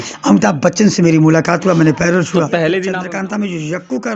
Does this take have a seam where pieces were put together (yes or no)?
yes